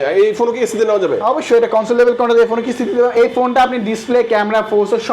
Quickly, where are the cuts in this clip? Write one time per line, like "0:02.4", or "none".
0:03.1